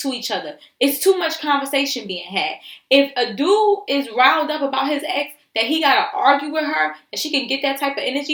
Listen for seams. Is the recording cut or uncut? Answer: uncut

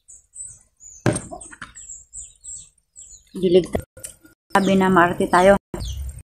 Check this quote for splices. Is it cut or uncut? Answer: cut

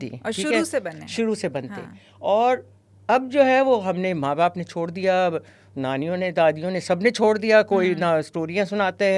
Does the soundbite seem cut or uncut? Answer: uncut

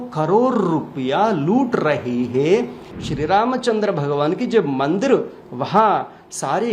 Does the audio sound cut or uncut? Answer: cut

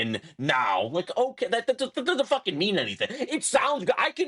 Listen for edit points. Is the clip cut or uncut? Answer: uncut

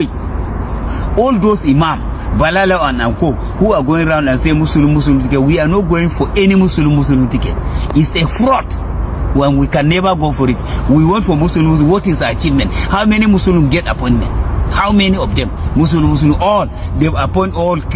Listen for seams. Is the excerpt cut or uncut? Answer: uncut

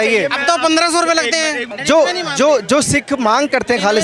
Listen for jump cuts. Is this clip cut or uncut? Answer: cut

